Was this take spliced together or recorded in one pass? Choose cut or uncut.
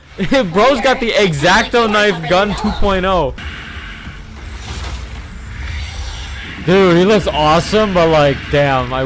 cut